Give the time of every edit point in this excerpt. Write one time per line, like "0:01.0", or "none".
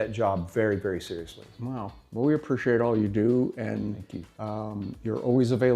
none